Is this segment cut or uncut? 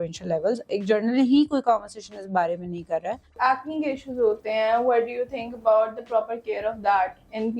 cut